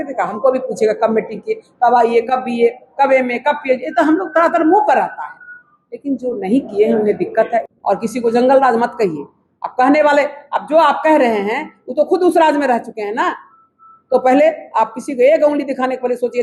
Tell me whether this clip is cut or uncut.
cut